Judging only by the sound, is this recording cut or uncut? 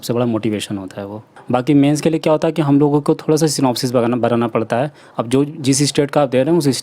cut